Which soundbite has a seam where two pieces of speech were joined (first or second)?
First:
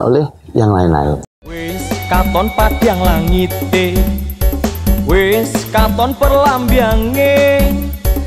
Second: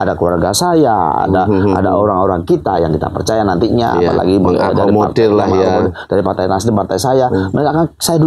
first